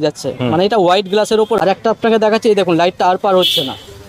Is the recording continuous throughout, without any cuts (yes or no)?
no